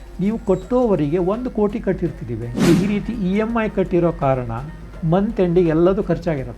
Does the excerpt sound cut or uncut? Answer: cut